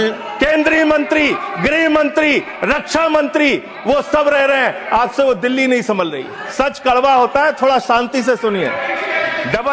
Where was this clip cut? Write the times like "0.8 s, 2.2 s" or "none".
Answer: 6.4 s